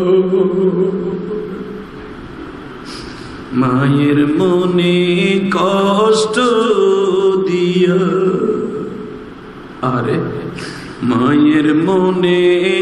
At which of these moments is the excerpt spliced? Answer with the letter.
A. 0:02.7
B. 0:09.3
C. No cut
C